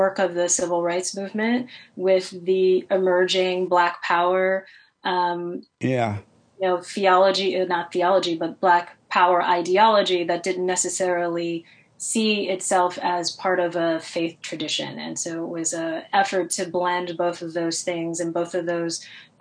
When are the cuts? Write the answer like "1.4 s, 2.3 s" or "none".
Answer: none